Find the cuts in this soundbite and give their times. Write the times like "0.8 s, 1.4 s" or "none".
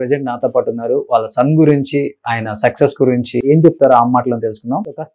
3.4 s

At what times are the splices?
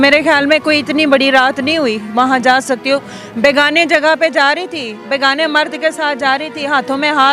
none

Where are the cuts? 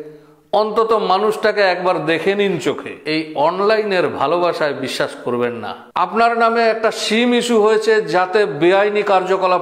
5.8 s

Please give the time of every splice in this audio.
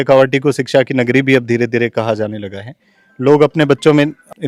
none

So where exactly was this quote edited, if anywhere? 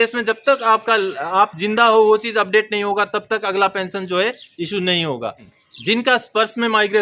5.5 s

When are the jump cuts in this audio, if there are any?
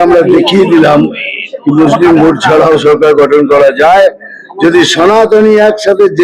none

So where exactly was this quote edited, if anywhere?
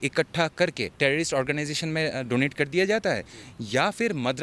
0.9 s

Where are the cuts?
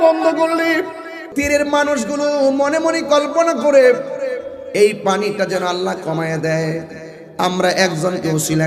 1.2 s

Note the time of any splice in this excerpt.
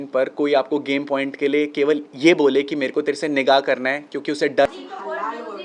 4.7 s

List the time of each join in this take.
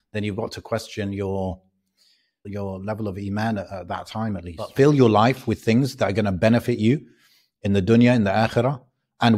2.5 s, 4.7 s

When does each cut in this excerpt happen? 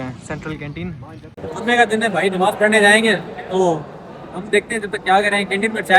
1.4 s

